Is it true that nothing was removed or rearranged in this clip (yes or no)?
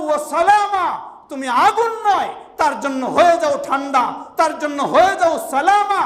yes